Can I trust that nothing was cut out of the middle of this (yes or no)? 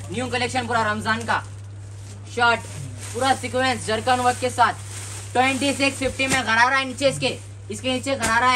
yes